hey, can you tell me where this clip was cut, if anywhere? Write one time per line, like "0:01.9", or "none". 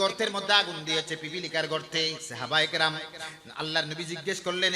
0:02.3